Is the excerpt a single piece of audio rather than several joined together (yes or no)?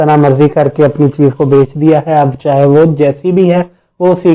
yes